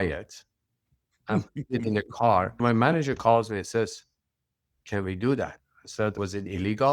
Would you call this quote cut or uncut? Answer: cut